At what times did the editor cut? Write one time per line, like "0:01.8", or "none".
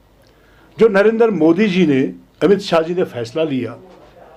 none